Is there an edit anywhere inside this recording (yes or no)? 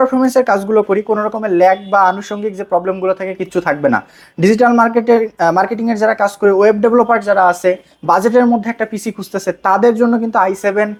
no